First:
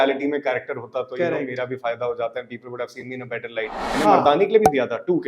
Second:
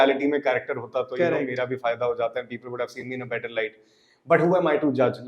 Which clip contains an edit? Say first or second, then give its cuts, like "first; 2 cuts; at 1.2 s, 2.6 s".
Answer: first; 1 cut; at 4.1 s